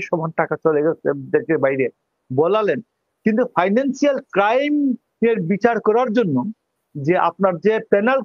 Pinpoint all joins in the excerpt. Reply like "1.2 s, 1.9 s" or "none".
none